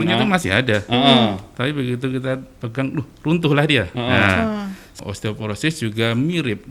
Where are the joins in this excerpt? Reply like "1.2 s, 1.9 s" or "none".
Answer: 4.9 s